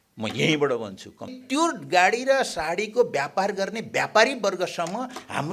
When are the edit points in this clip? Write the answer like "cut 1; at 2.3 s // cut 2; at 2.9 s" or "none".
cut 1; at 1.4 s

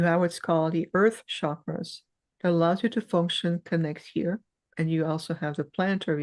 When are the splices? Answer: cut 1; at 4.7 s

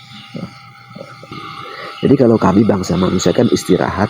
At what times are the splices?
cut 1; at 1.4 s

